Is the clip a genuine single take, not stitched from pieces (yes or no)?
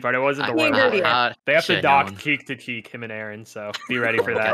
no